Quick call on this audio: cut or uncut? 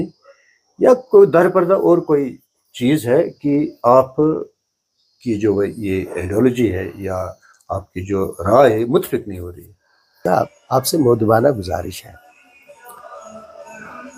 cut